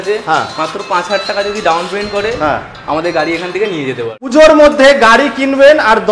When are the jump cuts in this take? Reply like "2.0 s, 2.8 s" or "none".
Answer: 4.3 s